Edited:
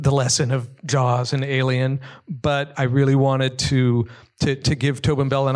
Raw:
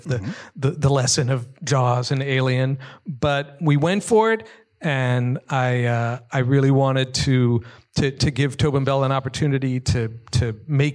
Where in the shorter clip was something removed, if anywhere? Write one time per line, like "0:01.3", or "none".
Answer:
0:02.7